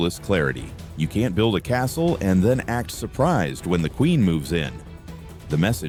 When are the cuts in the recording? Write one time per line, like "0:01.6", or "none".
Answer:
none